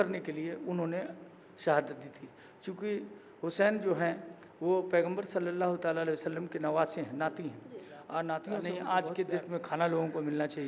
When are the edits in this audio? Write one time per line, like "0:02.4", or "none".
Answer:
0:08.6